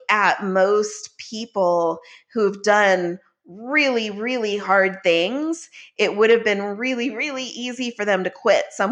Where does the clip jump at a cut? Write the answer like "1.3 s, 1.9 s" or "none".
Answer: none